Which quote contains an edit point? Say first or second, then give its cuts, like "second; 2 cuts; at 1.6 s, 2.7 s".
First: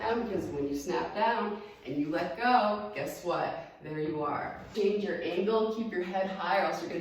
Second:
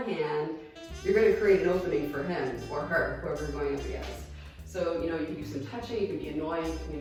first; 1 cut; at 4.7 s